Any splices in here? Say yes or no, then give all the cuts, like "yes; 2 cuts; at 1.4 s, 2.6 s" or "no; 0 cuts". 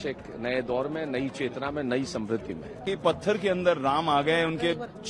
yes; 1 cut; at 2.8 s